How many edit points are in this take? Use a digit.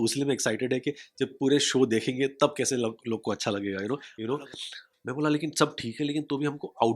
1